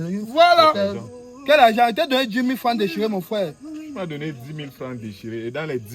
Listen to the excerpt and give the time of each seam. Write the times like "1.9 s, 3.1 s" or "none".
1.0 s